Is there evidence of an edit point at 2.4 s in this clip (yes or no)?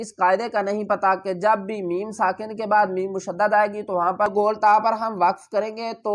no